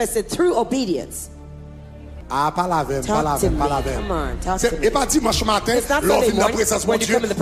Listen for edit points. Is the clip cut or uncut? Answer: cut